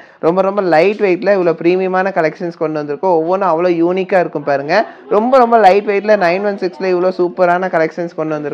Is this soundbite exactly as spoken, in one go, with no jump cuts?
yes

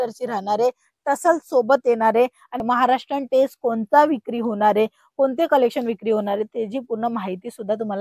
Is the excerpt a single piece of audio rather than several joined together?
no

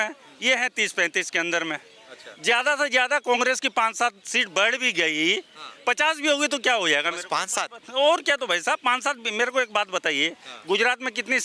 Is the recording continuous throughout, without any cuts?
yes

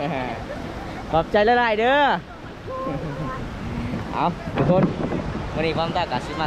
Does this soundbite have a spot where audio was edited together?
no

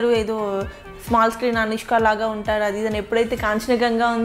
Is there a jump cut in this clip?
no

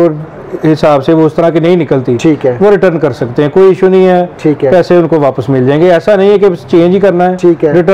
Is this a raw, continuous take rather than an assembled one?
yes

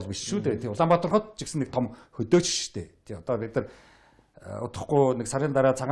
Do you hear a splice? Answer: no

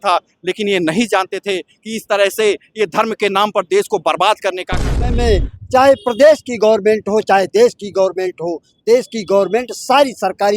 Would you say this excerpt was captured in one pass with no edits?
no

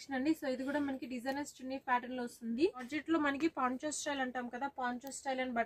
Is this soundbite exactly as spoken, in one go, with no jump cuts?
no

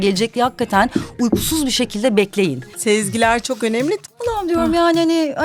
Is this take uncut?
no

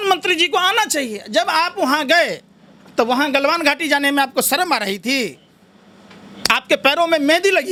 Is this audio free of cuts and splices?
yes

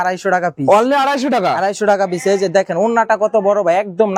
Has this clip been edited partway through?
no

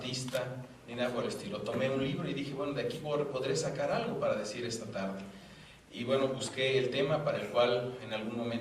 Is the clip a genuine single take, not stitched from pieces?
no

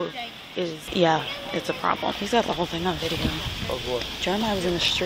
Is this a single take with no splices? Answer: no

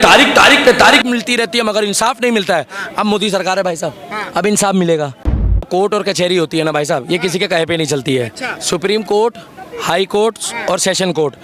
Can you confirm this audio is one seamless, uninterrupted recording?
no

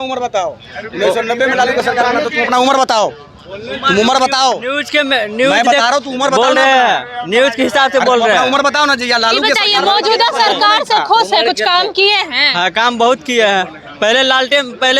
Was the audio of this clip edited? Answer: no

